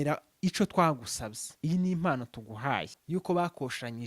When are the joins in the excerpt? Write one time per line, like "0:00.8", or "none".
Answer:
0:02.9